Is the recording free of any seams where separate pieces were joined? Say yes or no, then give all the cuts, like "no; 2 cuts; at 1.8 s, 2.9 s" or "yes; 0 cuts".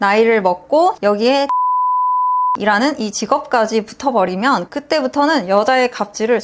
yes; 0 cuts